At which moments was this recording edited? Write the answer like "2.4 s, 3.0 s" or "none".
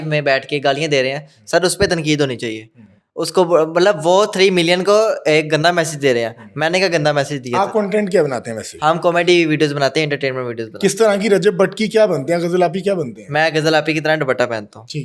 none